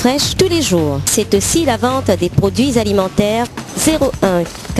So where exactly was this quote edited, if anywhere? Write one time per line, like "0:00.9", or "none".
0:01.0
0:03.5